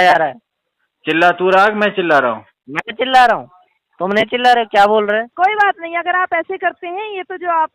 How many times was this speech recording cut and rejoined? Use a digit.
1